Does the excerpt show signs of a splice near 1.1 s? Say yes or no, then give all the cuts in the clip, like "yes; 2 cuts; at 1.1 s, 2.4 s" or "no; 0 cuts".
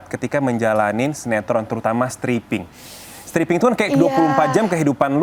no; 0 cuts